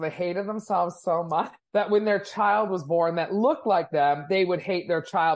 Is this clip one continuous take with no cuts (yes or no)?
yes